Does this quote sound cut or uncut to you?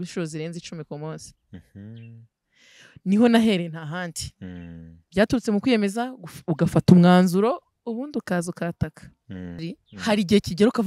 cut